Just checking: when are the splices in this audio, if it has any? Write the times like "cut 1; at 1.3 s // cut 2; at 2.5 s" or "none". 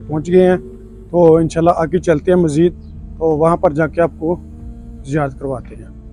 none

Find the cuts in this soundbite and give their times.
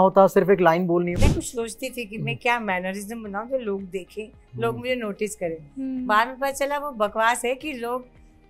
cut 1; at 1.1 s

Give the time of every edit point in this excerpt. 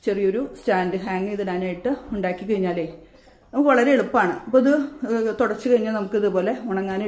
none

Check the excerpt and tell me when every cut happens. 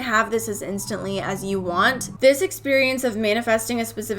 cut 1; at 2.1 s

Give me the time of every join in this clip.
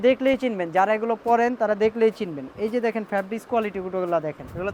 none

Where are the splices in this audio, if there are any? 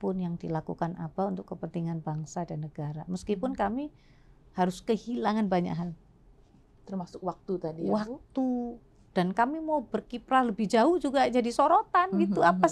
none

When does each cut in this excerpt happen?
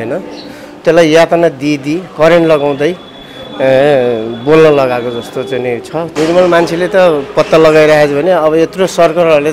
cut 1; at 6.1 s

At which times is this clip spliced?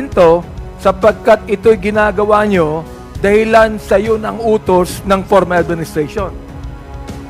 cut 1; at 6.3 s

